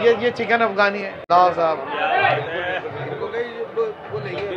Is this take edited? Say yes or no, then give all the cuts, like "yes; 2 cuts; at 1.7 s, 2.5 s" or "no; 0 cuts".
yes; 1 cut; at 1.1 s